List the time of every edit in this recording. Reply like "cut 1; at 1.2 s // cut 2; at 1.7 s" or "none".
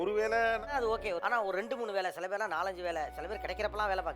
cut 1; at 1.2 s